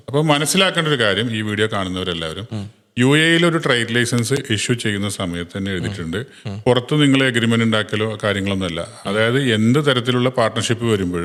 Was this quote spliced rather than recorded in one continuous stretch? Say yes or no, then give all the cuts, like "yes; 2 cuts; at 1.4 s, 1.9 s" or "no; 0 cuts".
no; 0 cuts